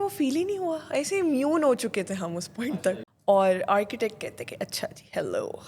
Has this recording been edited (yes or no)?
yes